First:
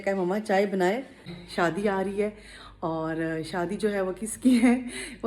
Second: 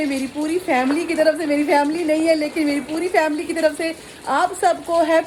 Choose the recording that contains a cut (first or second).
first